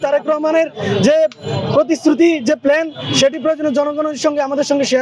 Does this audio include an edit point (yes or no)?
no